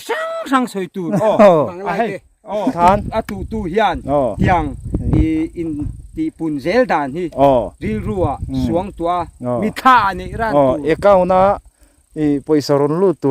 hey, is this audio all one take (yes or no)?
no